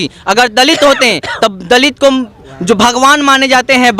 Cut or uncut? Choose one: uncut